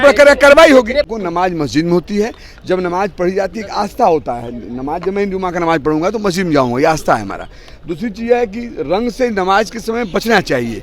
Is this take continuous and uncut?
no; 1 cut; at 1.1 s

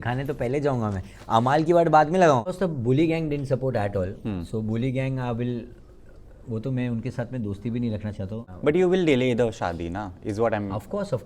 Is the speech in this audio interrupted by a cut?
yes; 2 cuts; at 2.5 s, 8.5 s

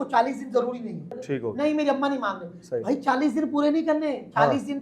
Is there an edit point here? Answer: yes; 1 cut; at 1.2 s

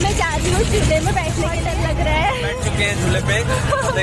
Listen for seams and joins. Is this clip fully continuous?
no; 2 cuts; at 1.6 s, 2.6 s

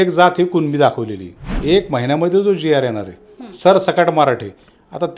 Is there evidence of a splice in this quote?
yes; 1 cut; at 1.5 s

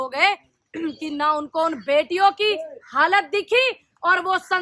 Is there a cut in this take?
no; 0 cuts

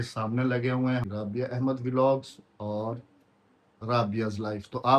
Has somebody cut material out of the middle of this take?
yes; 1 cut; at 1.1 s

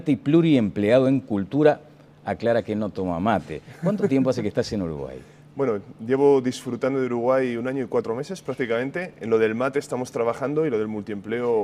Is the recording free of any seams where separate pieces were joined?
no; 1 cut; at 1.5 s

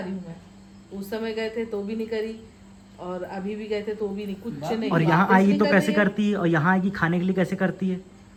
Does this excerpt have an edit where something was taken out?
no; 0 cuts

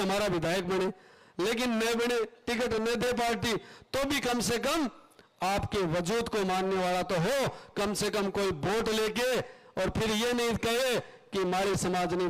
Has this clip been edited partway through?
no; 0 cuts

